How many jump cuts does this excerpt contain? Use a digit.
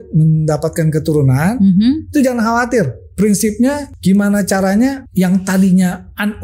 2